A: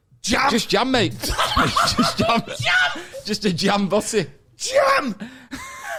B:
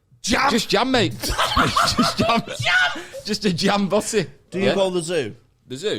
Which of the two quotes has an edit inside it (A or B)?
B